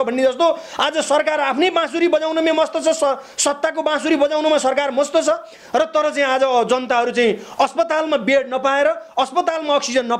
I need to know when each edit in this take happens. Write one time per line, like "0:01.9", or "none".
none